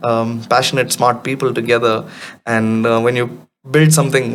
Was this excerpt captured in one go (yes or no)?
yes